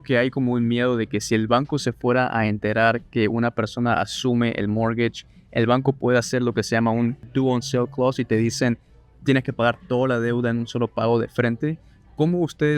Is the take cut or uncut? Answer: cut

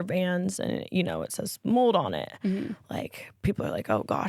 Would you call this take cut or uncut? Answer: uncut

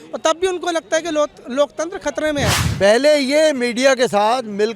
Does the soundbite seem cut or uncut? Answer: cut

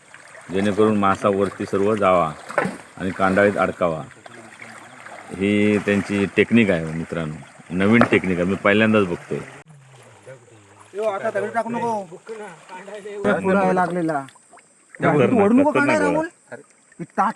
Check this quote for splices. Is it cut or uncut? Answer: cut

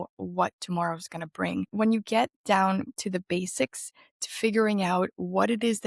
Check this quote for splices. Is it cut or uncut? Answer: cut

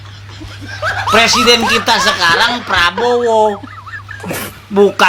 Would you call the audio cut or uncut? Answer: uncut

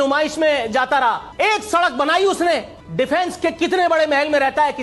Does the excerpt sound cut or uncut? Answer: cut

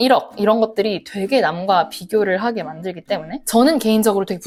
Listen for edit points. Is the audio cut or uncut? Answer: uncut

